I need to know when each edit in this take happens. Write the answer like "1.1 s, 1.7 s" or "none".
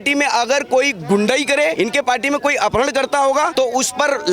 1.7 s, 3.5 s